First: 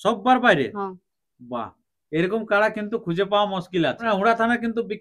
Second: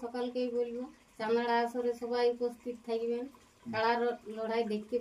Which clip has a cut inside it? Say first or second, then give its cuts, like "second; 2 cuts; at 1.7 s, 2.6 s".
first; 1 cut; at 4.0 s